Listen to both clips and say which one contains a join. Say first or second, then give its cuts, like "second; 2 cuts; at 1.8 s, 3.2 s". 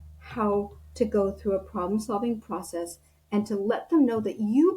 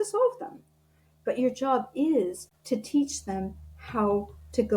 second; 1 cut; at 2.5 s